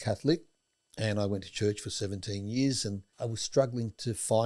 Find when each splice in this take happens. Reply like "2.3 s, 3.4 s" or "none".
3.1 s